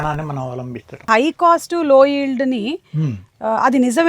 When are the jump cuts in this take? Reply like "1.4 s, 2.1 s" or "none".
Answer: 1.1 s